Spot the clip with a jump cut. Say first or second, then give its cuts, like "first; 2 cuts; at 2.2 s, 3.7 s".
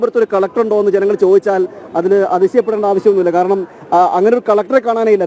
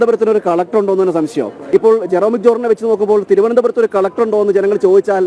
second; 1 cut; at 1.6 s